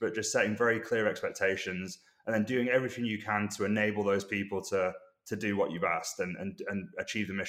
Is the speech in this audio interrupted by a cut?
no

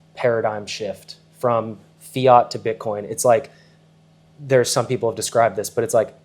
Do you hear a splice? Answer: no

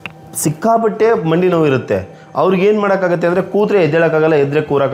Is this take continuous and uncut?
yes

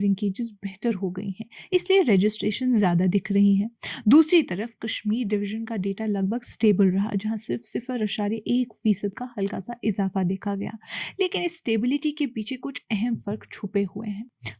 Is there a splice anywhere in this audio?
no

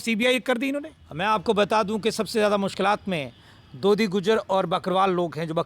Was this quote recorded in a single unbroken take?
no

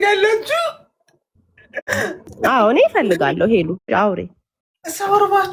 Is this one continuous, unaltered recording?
yes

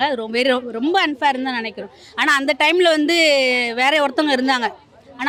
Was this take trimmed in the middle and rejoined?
no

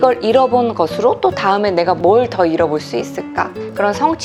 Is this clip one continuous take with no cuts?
yes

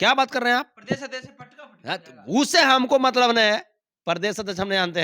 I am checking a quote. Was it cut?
no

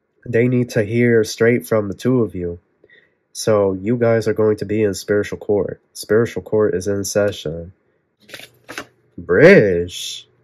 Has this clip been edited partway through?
yes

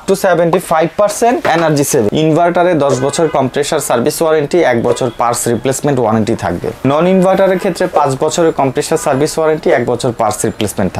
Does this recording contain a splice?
yes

